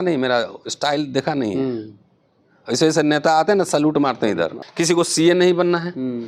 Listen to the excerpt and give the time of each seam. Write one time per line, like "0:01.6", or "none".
0:04.6